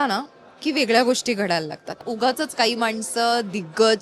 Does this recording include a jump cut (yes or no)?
yes